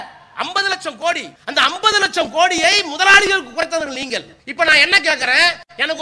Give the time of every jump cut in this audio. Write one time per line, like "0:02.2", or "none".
0:01.3
0:04.4